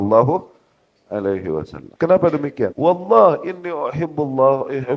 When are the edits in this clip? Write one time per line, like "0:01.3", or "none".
0:01.8
0:02.7